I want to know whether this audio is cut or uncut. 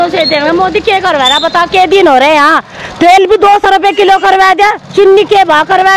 uncut